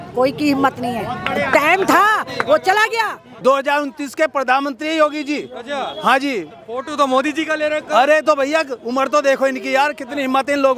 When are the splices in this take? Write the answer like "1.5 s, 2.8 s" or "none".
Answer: 3.3 s